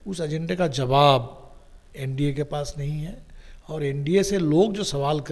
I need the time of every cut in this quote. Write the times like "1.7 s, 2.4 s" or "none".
none